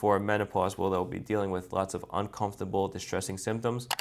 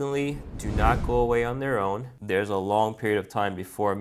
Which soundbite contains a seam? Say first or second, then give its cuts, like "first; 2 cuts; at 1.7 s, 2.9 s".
second; 1 cut; at 2.2 s